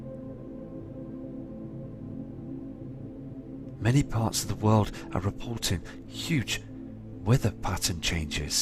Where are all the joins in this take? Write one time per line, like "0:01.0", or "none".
0:03.2